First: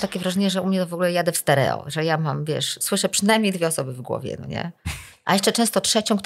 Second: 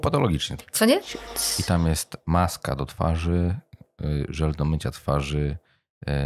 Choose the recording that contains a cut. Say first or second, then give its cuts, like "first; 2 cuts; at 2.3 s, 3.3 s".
second; 1 cut; at 1.1 s